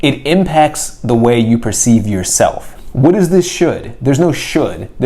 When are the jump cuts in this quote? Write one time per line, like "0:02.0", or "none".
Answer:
0:02.7